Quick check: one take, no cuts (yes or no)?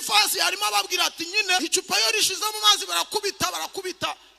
no